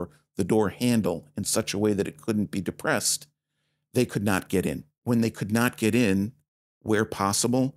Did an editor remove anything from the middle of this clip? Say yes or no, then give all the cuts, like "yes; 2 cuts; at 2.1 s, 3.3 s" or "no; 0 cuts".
yes; 1 cut; at 4.9 s